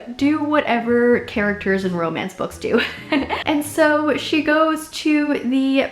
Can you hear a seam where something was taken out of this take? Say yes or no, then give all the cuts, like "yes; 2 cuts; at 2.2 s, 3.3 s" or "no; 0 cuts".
yes; 1 cut; at 3.3 s